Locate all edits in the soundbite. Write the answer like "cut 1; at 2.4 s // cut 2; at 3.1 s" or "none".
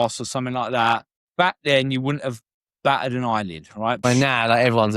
cut 1; at 1.2 s // cut 2; at 2.5 s // cut 3; at 4.0 s